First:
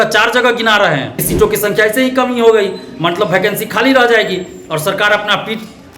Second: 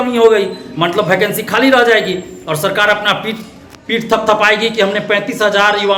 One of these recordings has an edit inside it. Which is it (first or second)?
first